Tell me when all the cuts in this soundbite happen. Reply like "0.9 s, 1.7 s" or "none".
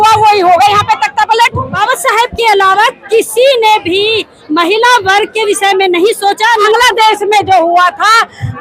1.6 s, 6.6 s